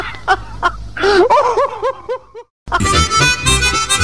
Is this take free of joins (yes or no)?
no